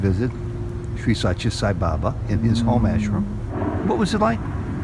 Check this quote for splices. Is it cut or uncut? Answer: uncut